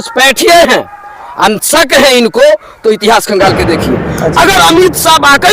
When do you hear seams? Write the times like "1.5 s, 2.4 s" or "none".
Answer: 4.3 s